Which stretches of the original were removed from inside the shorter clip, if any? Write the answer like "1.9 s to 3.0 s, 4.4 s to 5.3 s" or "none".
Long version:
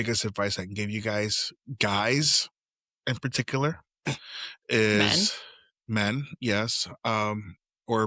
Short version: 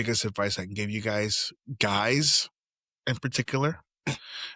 none